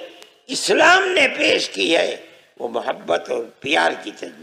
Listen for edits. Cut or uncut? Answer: uncut